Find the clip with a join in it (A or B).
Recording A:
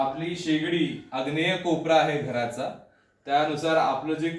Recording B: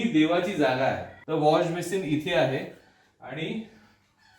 B